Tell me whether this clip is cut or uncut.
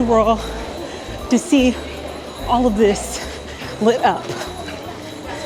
uncut